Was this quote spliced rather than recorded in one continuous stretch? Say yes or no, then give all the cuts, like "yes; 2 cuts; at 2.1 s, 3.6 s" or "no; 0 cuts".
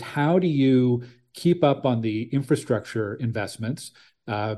no; 0 cuts